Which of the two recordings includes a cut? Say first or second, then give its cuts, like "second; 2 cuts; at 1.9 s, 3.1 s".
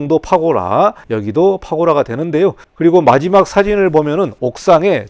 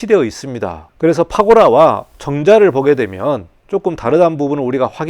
first; 2 cuts; at 1.1 s, 2.6 s